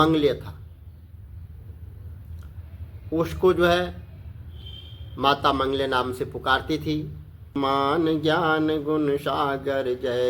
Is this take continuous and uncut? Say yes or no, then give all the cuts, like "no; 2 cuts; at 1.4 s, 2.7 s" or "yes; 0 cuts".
no; 1 cut; at 7.6 s